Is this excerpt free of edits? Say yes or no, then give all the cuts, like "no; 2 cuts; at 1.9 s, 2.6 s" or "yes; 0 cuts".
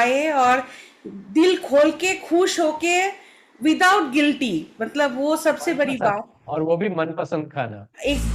yes; 0 cuts